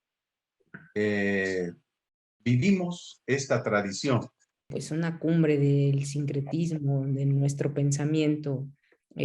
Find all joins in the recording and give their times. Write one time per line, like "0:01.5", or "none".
0:04.8